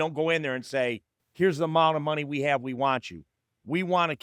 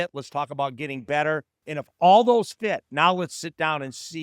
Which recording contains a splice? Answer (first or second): second